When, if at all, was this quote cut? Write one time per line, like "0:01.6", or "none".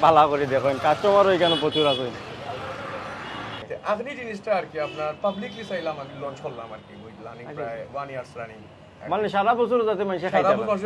0:03.6